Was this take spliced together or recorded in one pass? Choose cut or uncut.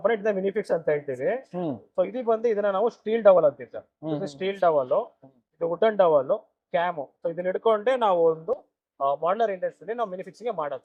uncut